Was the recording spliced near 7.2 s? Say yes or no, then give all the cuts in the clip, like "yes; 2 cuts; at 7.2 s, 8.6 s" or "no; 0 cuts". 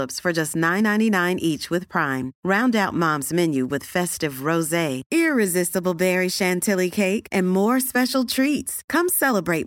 no; 0 cuts